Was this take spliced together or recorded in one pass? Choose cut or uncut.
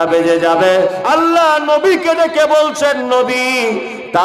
cut